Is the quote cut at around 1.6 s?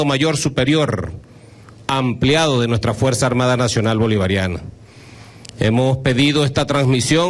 no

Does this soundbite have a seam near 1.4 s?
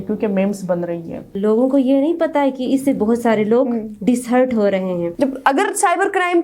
yes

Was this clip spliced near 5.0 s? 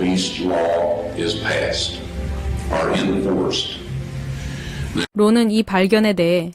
yes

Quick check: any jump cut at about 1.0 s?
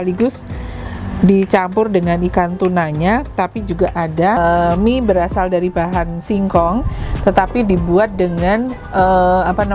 no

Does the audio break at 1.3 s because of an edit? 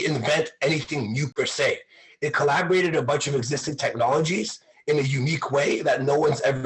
yes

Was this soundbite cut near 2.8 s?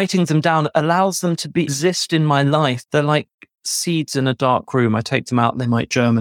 yes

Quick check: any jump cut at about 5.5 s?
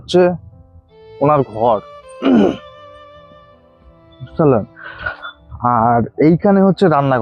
no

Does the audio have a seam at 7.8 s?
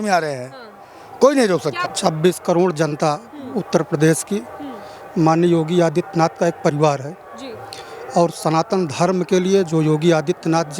no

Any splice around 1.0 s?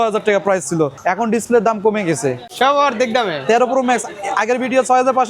yes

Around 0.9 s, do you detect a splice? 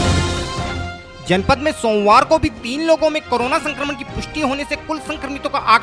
yes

